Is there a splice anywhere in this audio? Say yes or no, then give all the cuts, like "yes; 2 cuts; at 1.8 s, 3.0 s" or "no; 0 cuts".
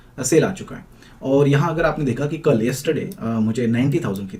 no; 0 cuts